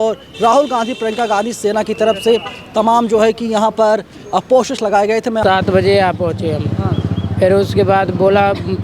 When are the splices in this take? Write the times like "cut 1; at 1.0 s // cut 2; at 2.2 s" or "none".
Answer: cut 1; at 5.4 s